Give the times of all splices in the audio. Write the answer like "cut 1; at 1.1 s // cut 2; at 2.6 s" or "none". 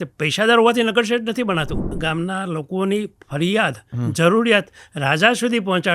cut 1; at 1.9 s